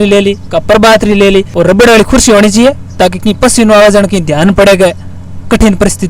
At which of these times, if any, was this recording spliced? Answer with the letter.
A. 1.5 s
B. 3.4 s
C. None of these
A